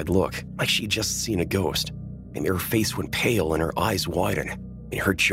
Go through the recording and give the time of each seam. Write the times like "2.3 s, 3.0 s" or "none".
none